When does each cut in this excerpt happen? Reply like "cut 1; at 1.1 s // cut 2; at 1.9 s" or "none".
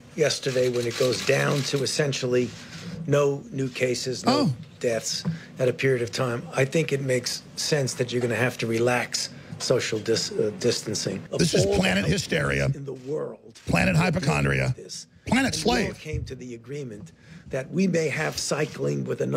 cut 1; at 11.2 s